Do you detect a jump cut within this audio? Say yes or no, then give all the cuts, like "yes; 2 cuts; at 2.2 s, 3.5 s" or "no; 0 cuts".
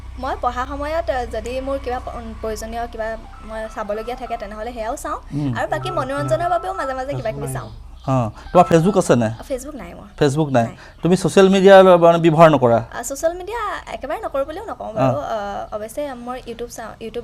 no; 0 cuts